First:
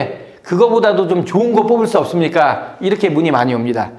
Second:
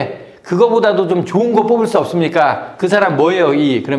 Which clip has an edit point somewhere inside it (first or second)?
second